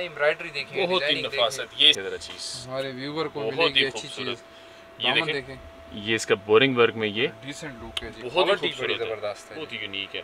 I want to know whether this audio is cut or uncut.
cut